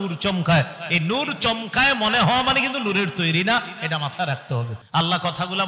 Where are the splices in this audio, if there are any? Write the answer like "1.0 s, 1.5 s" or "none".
4.8 s